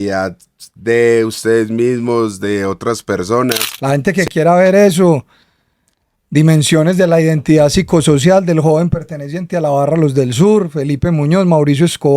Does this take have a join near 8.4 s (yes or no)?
no